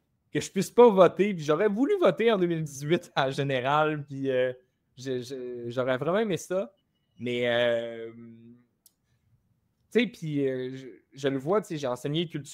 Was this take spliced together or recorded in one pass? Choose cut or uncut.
uncut